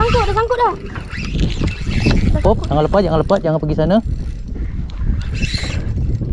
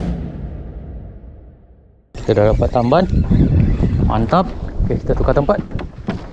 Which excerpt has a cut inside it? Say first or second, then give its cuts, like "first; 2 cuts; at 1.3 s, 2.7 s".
second; 1 cut; at 2.2 s